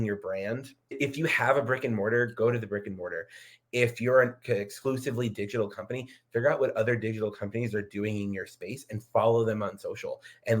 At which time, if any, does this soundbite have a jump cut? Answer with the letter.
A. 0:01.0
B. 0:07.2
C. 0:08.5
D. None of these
A